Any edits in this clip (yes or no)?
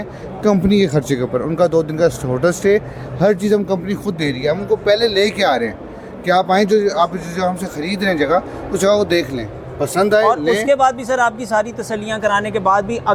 no